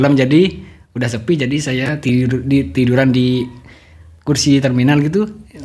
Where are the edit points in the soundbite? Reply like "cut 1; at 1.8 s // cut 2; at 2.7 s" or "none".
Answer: none